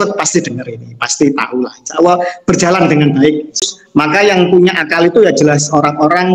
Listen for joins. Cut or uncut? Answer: cut